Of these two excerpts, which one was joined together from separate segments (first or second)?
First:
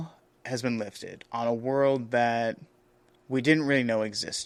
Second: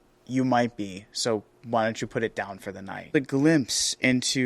second